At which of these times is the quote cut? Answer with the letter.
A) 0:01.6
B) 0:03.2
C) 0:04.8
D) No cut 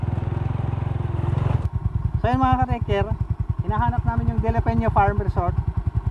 A